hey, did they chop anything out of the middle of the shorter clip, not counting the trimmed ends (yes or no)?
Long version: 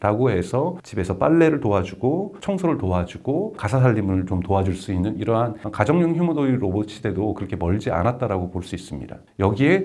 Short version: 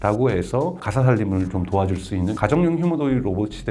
yes